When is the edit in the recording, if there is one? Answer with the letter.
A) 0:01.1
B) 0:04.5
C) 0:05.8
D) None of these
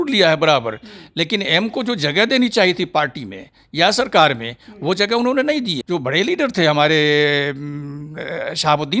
C